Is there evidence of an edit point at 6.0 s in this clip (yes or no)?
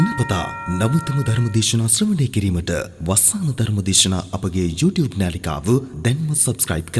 no